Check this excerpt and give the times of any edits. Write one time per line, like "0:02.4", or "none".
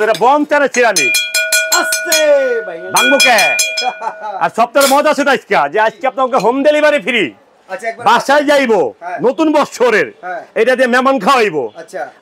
none